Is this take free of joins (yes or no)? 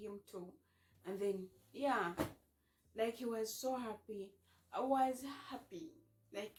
yes